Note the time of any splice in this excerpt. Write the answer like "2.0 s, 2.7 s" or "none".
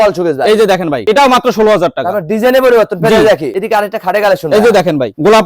1.0 s, 3.5 s